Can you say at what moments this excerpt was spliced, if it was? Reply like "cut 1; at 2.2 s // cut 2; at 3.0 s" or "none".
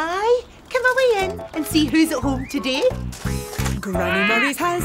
cut 1; at 3.0 s